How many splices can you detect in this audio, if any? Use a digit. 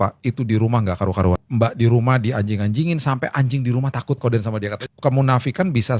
2